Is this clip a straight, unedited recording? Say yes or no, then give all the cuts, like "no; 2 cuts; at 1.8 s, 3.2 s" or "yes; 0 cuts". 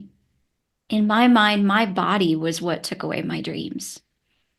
yes; 0 cuts